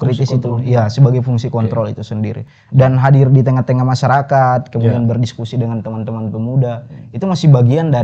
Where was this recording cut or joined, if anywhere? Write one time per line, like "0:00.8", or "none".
none